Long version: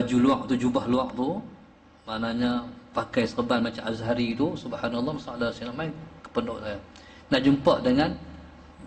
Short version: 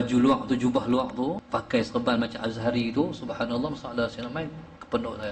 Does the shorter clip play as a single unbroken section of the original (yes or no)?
no